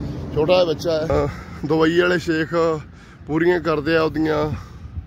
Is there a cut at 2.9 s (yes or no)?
no